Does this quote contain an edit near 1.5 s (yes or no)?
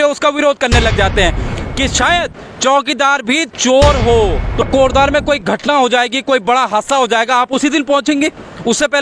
yes